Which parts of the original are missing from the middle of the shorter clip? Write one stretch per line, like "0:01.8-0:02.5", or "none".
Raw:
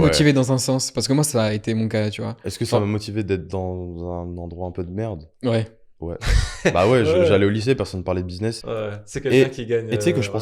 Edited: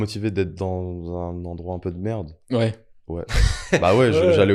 none